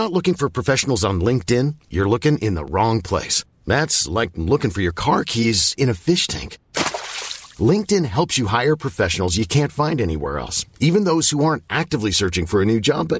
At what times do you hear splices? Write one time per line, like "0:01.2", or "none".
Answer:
none